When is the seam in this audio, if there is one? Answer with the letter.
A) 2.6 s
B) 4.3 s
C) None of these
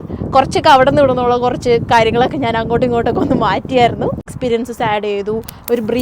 B